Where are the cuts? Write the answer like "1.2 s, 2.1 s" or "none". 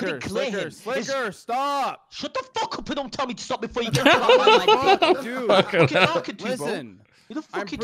none